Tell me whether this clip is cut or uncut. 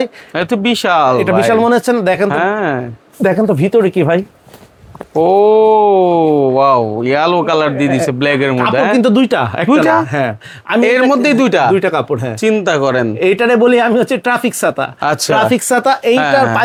uncut